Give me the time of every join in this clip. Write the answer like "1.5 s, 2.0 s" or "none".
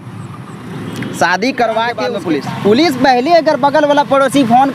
2.2 s